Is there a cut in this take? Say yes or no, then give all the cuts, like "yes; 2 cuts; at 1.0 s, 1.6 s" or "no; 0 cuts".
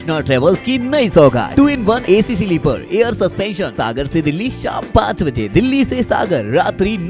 yes; 2 cuts; at 1.6 s, 3.7 s